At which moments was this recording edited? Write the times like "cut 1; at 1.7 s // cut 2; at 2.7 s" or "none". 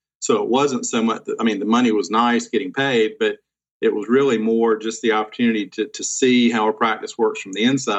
none